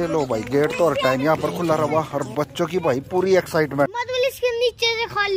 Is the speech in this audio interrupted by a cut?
yes; 1 cut; at 3.9 s

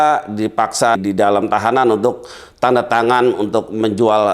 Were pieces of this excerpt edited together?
yes; 1 cut; at 1.0 s

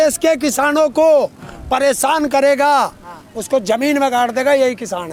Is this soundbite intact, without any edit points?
yes; 0 cuts

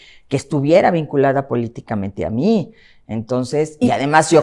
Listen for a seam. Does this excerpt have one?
no; 0 cuts

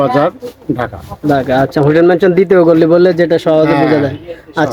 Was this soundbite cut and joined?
no; 0 cuts

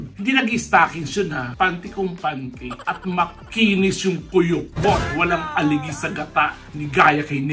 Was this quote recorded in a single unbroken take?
yes; 0 cuts

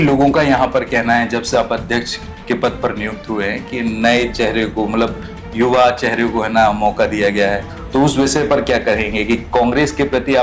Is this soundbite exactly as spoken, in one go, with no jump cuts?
no; 1 cut; at 7.7 s

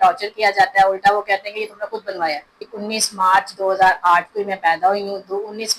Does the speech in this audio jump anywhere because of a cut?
yes; 1 cut; at 2.7 s

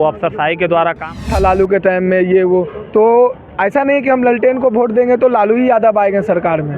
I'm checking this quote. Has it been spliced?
yes; 1 cut; at 1.3 s

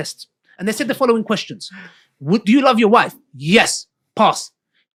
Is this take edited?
no; 0 cuts

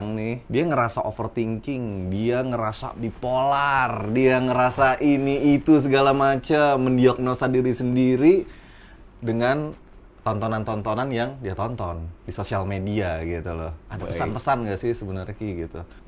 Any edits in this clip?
no; 0 cuts

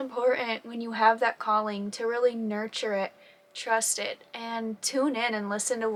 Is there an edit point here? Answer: no; 0 cuts

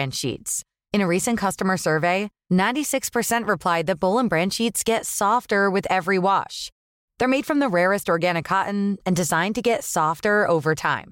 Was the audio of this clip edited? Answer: no; 0 cuts

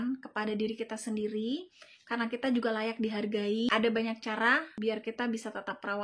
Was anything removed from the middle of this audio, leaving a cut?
yes; 2 cuts; at 3.7 s, 4.7 s

